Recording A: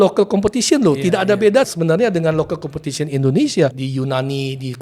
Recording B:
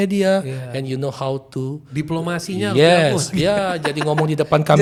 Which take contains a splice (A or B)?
A